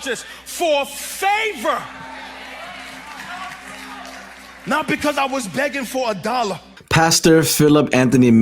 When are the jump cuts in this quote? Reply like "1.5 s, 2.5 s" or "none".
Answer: 6.8 s